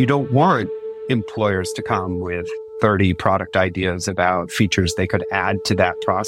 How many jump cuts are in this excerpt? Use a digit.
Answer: 1